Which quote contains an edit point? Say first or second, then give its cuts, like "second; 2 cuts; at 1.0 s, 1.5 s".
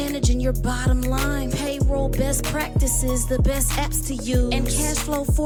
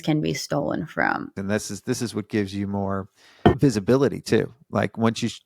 second; 1 cut; at 1.3 s